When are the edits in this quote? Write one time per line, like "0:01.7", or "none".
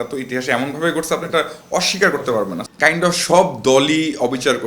0:02.7

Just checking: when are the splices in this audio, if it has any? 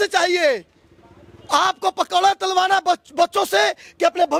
none

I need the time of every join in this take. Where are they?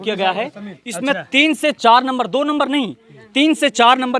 none

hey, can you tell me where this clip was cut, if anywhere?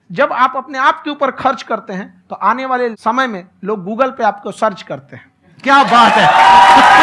none

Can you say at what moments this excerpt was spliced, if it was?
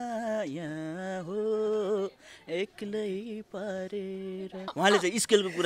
0:04.6

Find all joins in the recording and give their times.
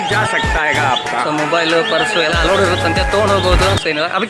none

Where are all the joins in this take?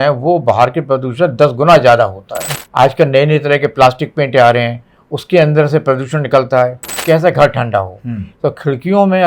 0:02.4
0:07.0

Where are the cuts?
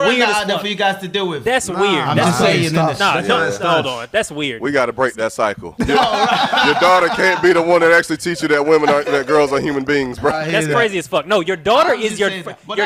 0:05.7
0:10.4

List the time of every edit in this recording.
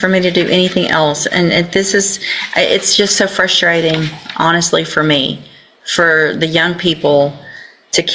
none

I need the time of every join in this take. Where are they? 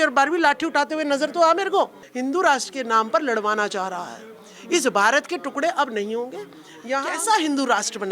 0:02.0
0:07.0

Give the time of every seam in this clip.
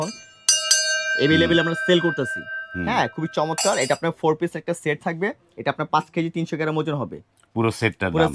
none

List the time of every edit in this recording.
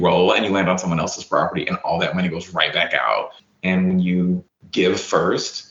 0:03.4

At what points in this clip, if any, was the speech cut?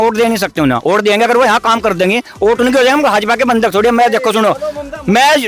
none

